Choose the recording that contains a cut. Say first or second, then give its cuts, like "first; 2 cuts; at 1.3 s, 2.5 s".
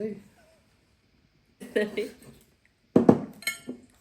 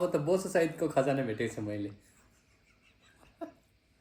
first; 1 cut; at 1.7 s